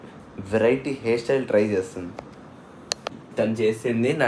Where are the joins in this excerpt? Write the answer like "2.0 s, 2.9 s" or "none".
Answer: 3.0 s